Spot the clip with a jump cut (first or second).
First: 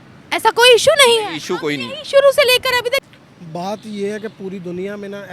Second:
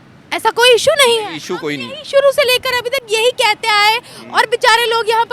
first